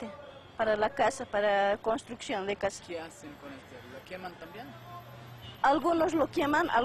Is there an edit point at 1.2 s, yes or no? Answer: yes